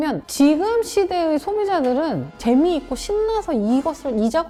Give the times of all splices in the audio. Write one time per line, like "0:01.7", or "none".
none

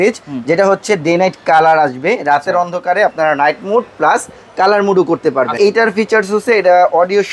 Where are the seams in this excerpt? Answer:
0:05.5

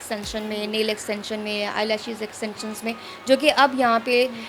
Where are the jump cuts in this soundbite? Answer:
none

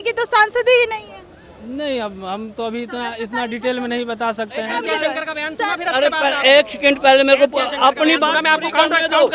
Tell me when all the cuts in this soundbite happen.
0:04.7

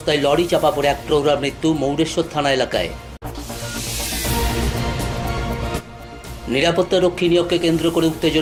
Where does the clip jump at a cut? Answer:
none

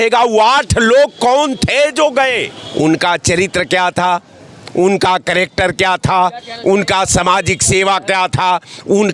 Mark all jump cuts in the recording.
0:02.6

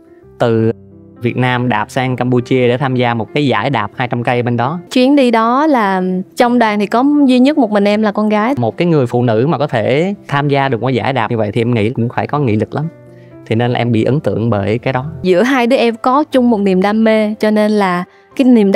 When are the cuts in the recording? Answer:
0:04.9
0:08.6
0:15.1

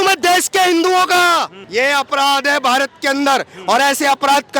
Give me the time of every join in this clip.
0:01.6

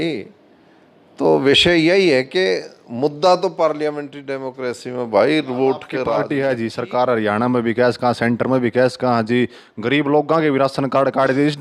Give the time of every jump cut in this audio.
0:06.1

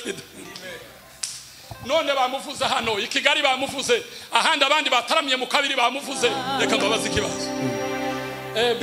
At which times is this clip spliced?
0:06.4

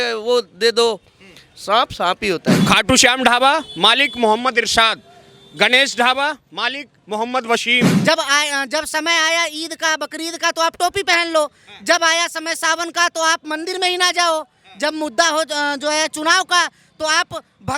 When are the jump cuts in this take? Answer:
0:02.6
0:07.9

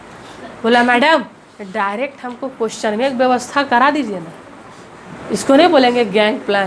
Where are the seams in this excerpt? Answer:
none

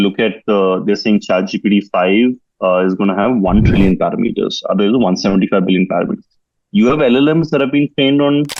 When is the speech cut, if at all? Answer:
none

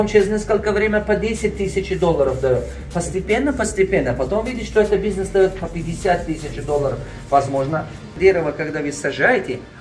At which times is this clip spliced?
0:08.1

